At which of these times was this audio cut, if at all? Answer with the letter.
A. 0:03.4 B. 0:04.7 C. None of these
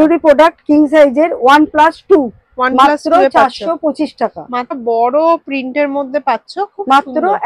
B